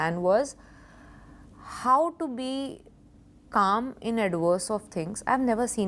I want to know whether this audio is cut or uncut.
uncut